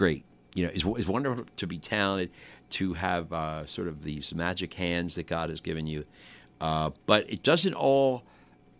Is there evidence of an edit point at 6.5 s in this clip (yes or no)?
no